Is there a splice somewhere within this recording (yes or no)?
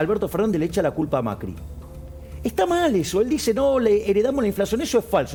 no